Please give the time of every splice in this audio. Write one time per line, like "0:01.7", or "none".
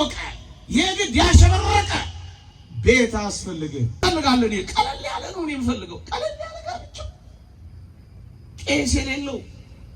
0:04.0